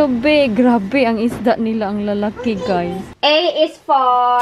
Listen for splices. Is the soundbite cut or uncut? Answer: cut